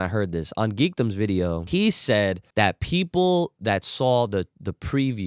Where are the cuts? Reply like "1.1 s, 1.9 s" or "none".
1.6 s, 2.4 s